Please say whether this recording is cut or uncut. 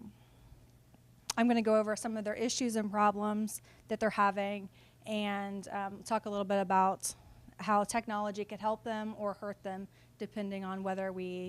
cut